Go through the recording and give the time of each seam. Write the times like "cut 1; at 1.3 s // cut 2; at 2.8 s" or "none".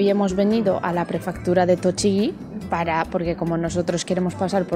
none